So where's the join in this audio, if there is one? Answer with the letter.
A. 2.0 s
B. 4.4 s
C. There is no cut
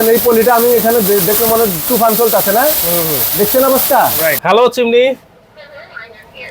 B